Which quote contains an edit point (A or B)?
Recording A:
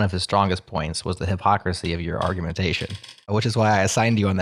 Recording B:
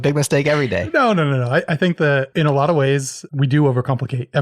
B